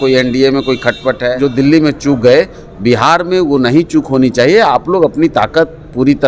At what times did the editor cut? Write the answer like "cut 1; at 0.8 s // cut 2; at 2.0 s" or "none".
cut 1; at 1.3 s